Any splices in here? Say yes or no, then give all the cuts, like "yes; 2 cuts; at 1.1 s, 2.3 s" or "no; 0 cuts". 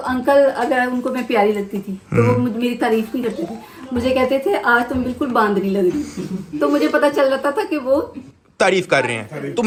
no; 0 cuts